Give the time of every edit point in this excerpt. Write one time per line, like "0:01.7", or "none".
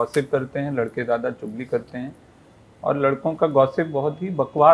none